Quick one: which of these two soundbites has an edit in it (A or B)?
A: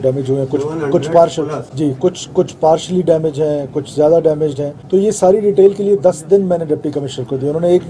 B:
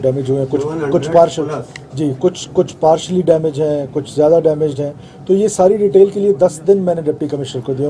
A